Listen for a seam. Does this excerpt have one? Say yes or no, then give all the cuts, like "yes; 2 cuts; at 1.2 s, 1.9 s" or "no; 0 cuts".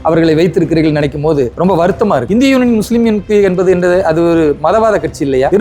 yes; 1 cut; at 2.3 s